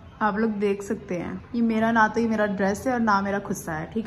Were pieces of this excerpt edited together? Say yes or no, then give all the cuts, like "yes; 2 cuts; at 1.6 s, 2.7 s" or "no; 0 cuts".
yes; 1 cut; at 1.4 s